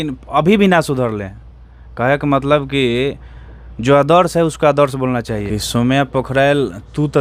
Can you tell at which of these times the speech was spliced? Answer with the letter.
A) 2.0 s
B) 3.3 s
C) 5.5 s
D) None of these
C